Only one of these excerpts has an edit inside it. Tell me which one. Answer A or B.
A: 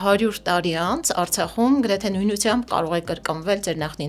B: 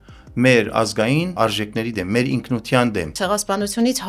B